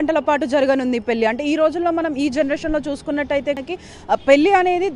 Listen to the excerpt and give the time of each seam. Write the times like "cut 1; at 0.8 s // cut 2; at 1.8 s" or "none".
cut 1; at 3.6 s